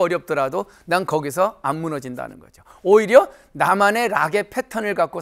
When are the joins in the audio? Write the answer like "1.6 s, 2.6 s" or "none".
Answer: none